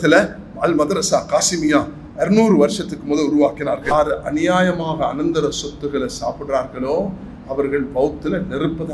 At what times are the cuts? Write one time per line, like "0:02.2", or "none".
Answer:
0:03.8